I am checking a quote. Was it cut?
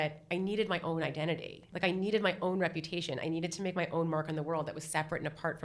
yes; 1 cut; at 1.7 s

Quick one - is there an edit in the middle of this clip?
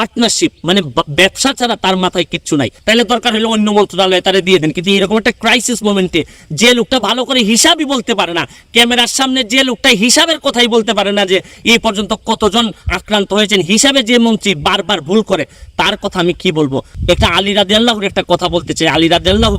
yes; 2 cuts; at 2.8 s, 16.9 s

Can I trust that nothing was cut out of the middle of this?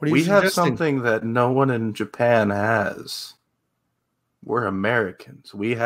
yes; 0 cuts

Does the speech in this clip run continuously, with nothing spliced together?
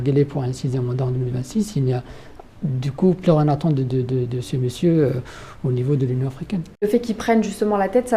no; 1 cut; at 6.7 s

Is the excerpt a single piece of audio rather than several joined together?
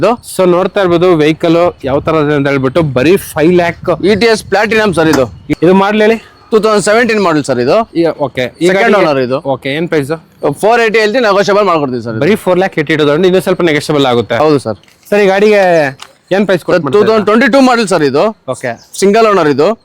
no; 2 cuts; at 5.4 s, 14.4 s

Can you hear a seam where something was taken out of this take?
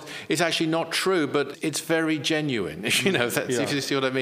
yes; 1 cut; at 1.5 s

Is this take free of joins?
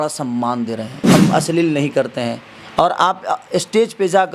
no; 1 cut; at 0.9 s

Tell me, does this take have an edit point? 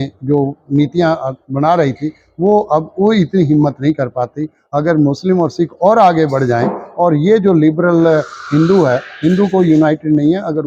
no; 0 cuts

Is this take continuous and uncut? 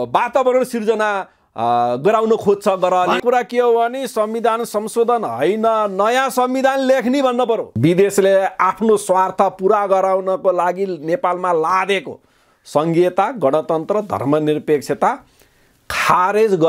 no; 2 cuts; at 3.2 s, 7.7 s

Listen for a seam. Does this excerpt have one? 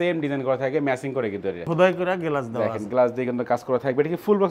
yes; 1 cut; at 1.7 s

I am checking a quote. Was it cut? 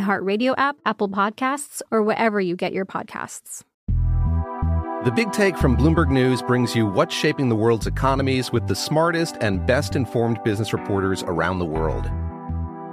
yes; 1 cut; at 3.7 s

